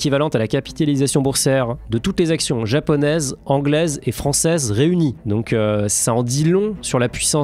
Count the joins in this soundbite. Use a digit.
0